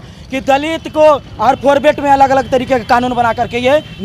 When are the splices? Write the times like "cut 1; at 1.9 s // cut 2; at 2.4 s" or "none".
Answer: none